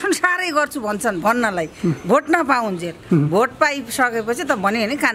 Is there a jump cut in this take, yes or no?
no